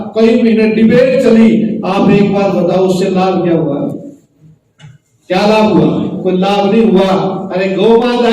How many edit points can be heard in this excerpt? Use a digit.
1